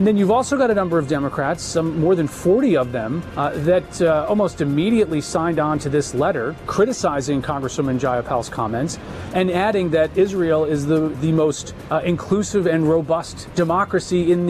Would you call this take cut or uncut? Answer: cut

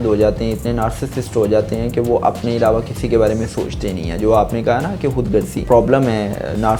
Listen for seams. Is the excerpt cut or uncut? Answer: cut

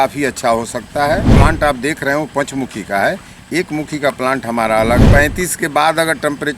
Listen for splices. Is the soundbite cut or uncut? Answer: cut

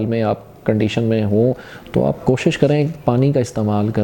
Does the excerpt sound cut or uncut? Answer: uncut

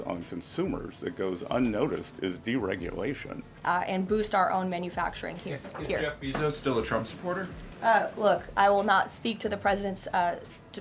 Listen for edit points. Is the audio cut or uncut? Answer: cut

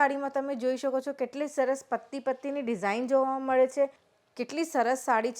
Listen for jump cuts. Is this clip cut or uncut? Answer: cut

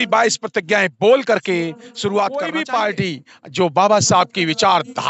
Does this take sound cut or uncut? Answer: cut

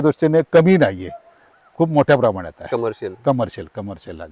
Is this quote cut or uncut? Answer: uncut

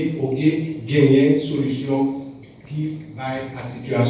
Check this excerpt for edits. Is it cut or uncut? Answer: uncut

